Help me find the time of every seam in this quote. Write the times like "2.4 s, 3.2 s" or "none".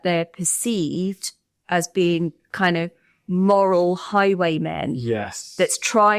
none